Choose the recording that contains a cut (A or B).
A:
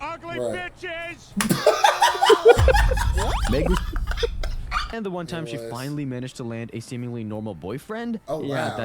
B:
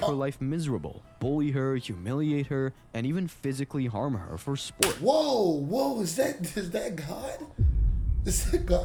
A